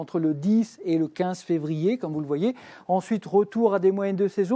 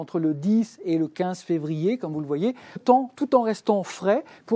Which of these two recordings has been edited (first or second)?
first